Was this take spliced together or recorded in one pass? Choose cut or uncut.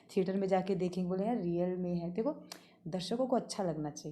uncut